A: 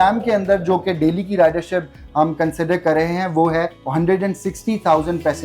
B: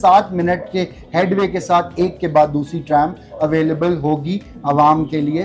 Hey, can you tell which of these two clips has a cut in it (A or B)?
A